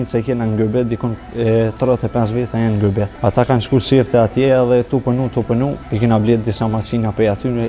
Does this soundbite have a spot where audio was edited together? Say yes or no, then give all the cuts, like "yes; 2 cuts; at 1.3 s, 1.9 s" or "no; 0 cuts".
yes; 2 cuts; at 3.1 s, 5.8 s